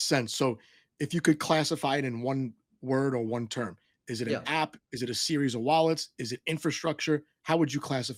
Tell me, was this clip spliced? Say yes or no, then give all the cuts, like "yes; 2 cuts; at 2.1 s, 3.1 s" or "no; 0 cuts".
no; 0 cuts